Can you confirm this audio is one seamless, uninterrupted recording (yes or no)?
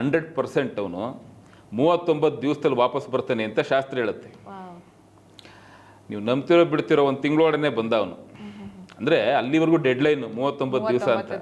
yes